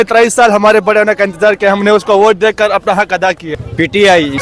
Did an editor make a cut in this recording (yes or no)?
yes